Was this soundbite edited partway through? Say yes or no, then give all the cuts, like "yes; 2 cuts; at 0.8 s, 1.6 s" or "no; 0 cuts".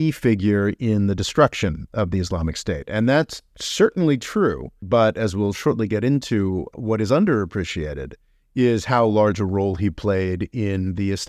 yes; 2 cuts; at 4.8 s, 6.7 s